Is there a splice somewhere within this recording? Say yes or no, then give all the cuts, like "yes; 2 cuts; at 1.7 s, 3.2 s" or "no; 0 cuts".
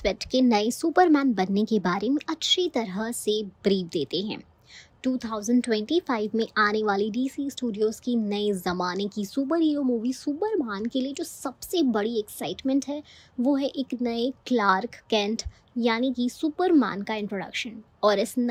no; 0 cuts